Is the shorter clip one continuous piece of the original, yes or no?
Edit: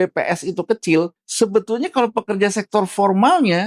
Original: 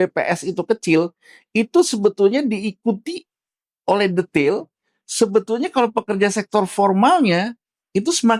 no